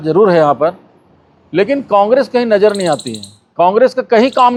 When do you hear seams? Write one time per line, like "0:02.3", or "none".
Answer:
none